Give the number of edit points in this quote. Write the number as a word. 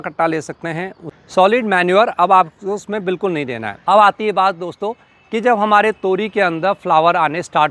two